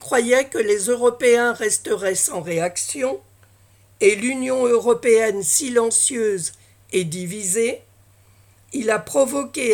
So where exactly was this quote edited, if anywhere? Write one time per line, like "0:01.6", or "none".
none